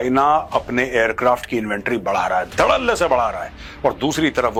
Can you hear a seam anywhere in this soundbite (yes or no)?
no